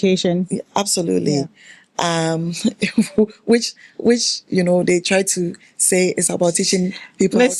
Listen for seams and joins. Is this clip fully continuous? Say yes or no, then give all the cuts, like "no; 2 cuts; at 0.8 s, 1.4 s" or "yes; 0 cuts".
yes; 0 cuts